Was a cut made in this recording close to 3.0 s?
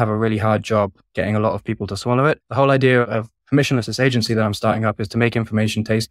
yes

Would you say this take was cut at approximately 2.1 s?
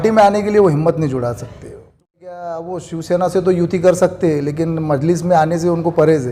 yes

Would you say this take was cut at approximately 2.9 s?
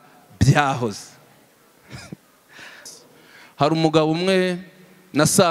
yes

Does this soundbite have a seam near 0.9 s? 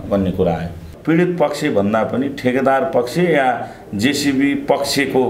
yes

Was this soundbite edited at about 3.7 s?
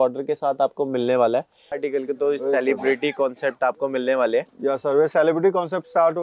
no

